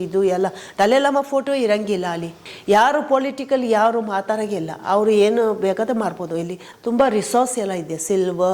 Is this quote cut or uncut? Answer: cut